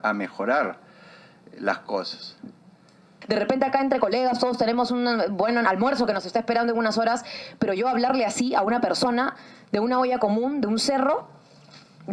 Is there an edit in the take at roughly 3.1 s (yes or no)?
yes